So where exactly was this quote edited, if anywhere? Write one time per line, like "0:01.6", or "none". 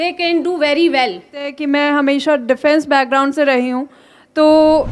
0:01.6